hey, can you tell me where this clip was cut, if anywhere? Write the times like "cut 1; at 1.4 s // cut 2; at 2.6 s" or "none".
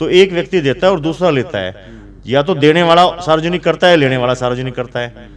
none